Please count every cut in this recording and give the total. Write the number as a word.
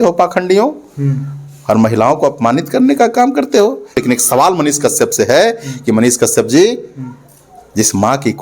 one